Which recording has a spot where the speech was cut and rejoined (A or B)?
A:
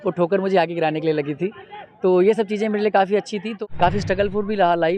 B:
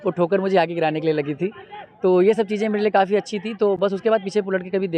A